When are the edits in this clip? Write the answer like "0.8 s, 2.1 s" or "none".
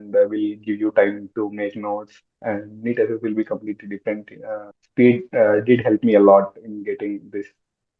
4.8 s